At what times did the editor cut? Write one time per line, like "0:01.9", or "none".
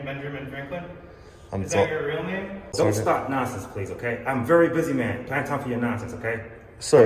0:02.8